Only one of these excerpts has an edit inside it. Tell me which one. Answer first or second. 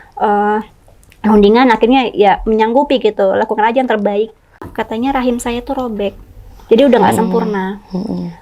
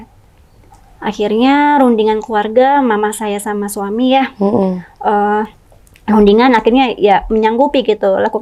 first